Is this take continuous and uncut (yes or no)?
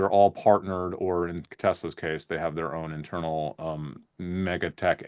yes